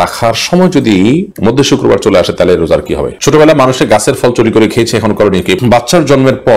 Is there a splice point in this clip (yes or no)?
yes